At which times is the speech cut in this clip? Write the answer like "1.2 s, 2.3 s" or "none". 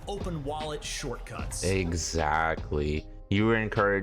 3.1 s